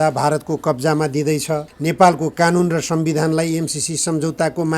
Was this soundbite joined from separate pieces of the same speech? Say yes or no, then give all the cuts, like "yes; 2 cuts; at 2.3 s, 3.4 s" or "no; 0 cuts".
yes; 1 cut; at 1.7 s